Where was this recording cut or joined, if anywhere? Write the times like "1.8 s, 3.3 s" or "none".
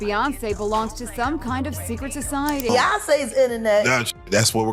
2.7 s

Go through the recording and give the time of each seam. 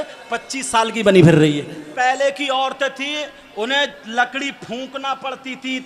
1.9 s

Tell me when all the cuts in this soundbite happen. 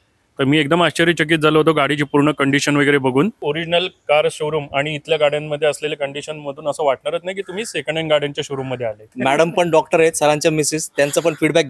3.4 s, 9.1 s

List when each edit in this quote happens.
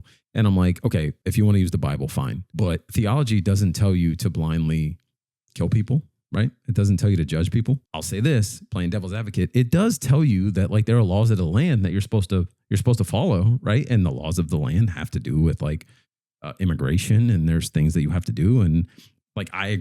1.2 s, 2.8 s, 7.9 s

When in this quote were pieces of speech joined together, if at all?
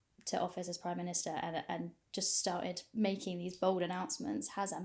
none

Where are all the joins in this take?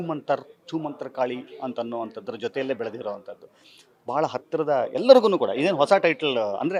none

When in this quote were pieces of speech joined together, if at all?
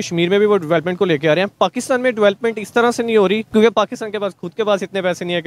3.4 s

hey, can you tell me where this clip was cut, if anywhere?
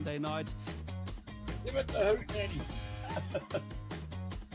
none

